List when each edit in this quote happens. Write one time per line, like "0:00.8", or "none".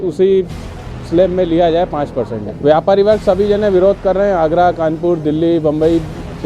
0:02.4